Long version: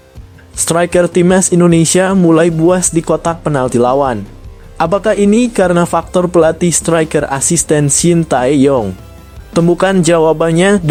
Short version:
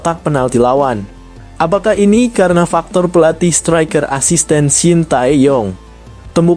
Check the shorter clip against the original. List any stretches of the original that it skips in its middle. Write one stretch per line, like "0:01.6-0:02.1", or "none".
none